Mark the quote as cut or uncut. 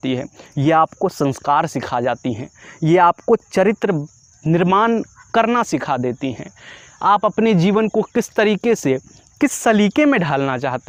uncut